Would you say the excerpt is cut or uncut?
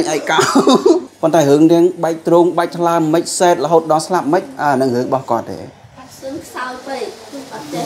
cut